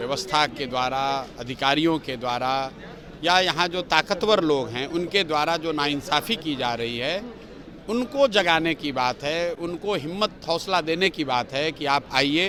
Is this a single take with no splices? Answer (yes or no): yes